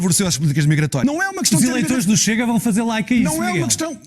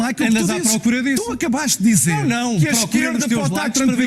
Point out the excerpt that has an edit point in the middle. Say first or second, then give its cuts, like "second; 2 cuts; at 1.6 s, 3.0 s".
first; 1 cut; at 1.0 s